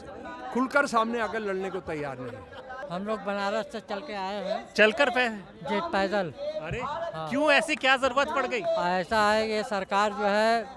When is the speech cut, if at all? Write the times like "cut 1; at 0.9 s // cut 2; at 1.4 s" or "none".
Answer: cut 1; at 2.8 s